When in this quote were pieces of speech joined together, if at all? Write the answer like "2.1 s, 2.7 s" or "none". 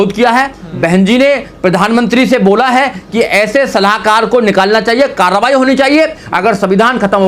6.2 s